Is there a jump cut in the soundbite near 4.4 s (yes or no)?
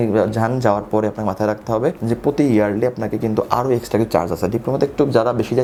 no